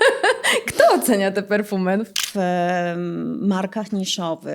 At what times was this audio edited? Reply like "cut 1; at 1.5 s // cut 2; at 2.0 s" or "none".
cut 1; at 2.2 s